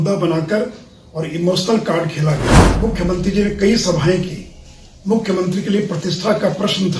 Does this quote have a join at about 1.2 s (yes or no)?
no